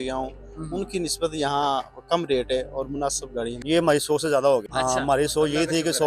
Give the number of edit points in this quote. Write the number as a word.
two